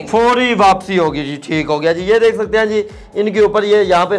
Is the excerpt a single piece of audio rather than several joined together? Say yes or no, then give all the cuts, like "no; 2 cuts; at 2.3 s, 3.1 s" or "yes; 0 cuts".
yes; 0 cuts